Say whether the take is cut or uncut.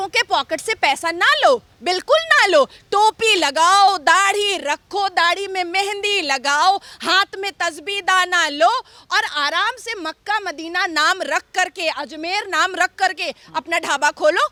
uncut